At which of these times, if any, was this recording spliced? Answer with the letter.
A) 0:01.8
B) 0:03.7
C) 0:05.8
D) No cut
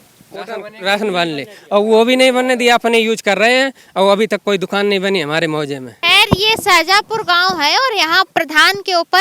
D